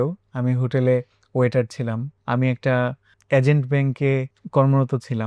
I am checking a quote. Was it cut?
yes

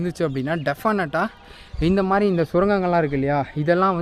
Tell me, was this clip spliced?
no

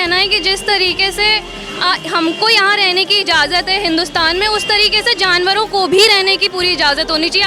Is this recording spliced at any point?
no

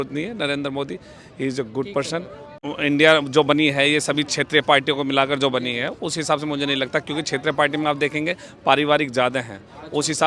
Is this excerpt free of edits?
no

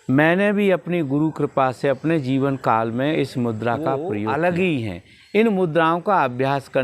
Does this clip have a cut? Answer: yes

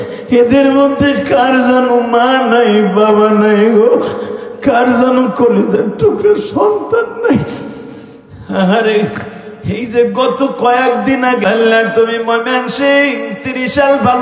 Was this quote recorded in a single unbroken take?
no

